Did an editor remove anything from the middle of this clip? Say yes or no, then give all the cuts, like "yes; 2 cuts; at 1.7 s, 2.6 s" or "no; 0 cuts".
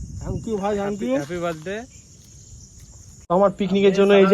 yes; 1 cut; at 3.1 s